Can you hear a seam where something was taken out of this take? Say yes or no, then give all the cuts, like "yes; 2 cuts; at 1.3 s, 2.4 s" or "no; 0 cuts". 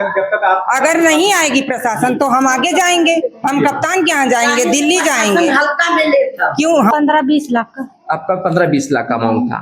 yes; 1 cut; at 6.9 s